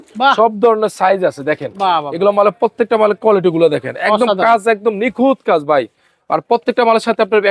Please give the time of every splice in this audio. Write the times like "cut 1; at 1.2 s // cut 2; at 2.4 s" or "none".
none